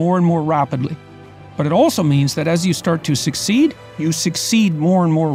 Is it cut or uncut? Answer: uncut